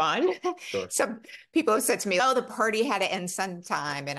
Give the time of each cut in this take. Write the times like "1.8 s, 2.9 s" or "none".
2.2 s